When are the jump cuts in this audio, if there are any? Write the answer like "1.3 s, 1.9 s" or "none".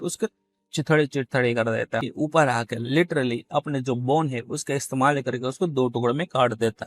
2.1 s